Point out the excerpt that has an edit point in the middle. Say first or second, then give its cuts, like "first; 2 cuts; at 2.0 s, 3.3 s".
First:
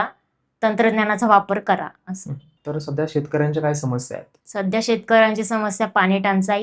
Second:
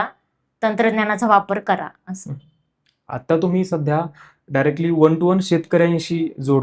first; 1 cut; at 2.6 s